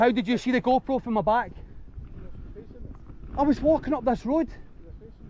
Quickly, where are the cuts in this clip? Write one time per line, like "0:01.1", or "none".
none